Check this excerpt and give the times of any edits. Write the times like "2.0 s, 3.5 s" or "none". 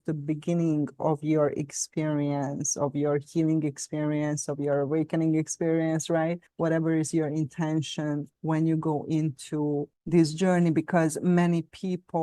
none